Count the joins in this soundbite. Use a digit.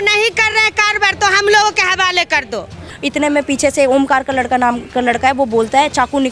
1